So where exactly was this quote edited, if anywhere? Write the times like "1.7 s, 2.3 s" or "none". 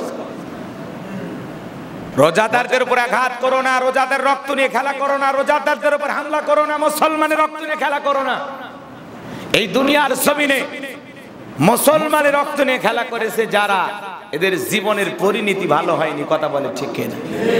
2.1 s